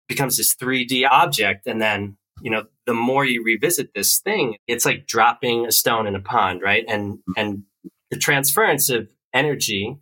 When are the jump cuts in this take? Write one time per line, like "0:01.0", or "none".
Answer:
0:01.1
0:04.7